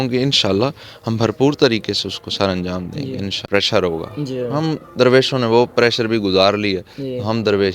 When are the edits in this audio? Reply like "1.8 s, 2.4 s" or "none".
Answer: 3.5 s